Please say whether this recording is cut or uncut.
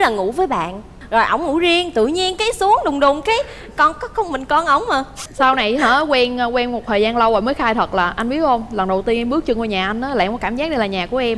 cut